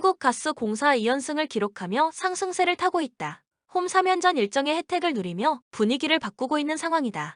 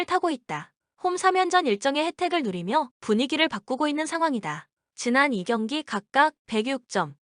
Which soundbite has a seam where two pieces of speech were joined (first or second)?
second